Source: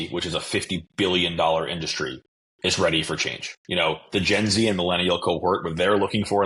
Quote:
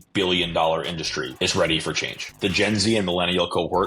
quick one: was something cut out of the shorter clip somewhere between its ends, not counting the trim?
yes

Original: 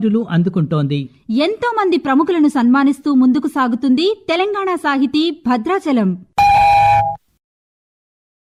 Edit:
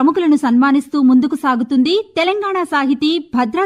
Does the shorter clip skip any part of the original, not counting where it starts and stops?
no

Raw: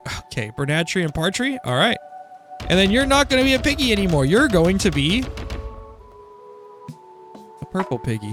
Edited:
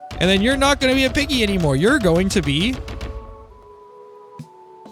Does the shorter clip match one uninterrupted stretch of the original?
yes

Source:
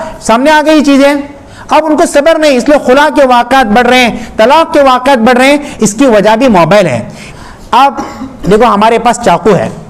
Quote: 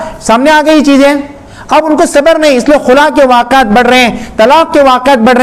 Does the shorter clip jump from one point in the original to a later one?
no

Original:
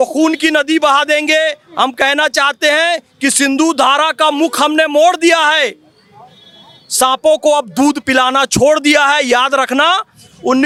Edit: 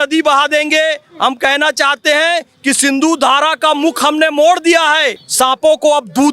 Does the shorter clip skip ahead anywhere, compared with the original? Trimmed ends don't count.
yes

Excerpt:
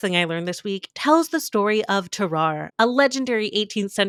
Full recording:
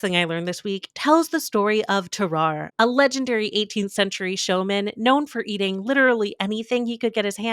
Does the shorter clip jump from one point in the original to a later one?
no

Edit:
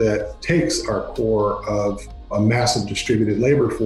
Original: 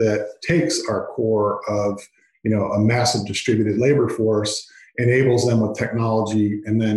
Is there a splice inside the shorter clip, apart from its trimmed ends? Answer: yes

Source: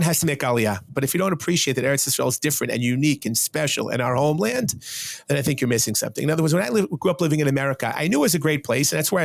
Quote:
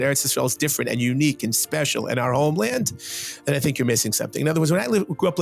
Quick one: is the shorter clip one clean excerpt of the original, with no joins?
yes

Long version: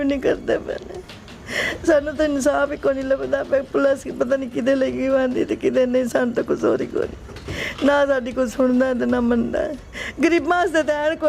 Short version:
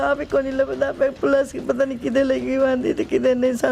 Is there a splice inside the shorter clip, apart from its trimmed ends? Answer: no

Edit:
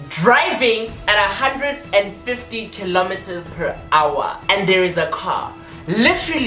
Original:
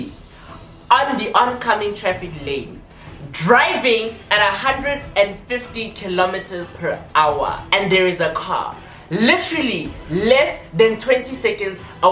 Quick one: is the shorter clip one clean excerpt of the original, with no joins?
yes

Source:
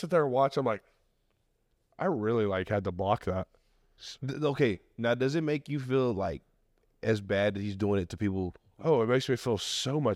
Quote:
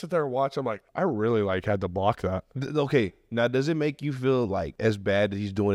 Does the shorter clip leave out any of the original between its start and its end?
yes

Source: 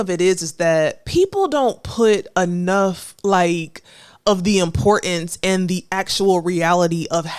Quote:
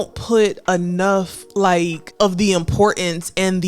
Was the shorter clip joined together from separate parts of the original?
yes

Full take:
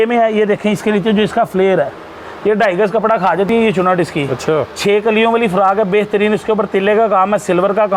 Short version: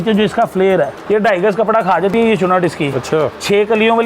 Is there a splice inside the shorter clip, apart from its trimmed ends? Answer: yes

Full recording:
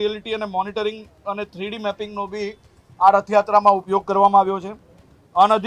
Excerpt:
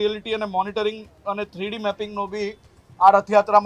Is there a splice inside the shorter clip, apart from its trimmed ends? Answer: no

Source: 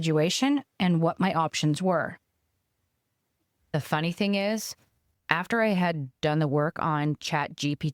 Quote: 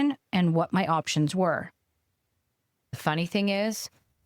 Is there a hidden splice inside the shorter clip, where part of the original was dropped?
yes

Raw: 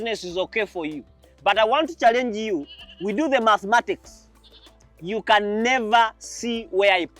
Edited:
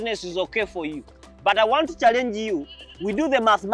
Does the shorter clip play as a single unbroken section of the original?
yes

